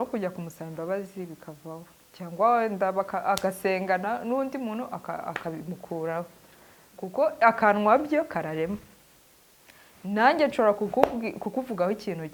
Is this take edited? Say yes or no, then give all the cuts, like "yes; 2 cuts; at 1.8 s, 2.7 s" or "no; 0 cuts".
no; 0 cuts